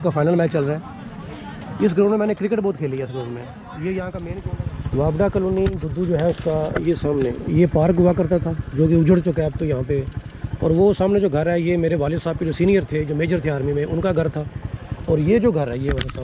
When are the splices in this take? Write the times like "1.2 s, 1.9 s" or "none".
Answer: 4.4 s